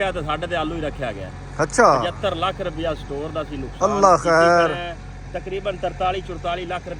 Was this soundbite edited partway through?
no; 0 cuts

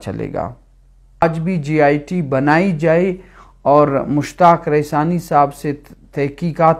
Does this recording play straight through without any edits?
no; 1 cut; at 1.2 s

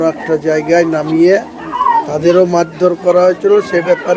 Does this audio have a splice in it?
no; 0 cuts

